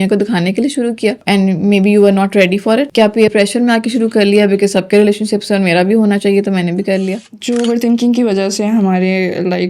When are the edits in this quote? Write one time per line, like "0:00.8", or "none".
0:07.2